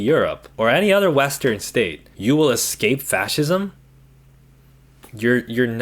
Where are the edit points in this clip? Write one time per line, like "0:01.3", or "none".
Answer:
none

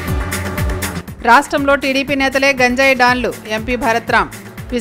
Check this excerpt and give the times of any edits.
0:01.0

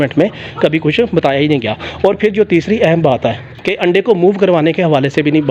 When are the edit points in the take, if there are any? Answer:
none

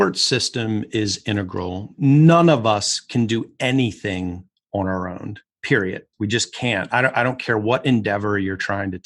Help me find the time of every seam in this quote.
0:02.0
0:06.1

